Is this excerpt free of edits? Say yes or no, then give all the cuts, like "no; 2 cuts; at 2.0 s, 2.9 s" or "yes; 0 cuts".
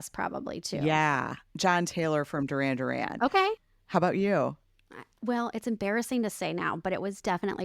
no; 2 cuts; at 1.4 s, 3.6 s